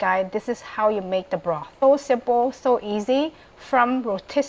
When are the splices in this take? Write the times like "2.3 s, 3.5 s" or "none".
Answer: 1.8 s